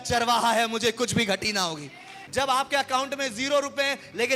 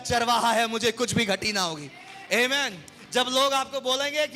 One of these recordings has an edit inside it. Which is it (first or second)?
first